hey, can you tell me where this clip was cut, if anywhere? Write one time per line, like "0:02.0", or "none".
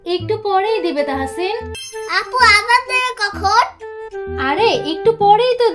0:01.8